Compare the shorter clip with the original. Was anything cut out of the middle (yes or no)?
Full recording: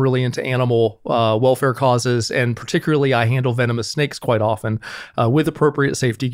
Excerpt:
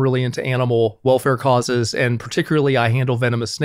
yes